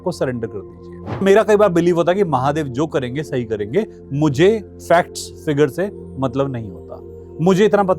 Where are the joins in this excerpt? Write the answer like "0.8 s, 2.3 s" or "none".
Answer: 1.2 s